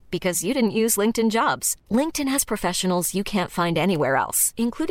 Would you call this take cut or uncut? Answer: uncut